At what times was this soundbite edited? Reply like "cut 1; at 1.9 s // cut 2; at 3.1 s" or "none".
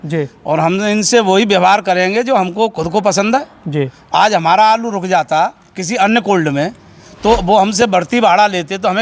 none